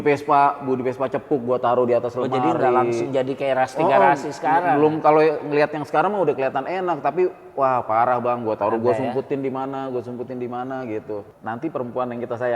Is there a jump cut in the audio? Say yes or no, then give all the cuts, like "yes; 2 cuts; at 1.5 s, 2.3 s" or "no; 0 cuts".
yes; 1 cut; at 11.3 s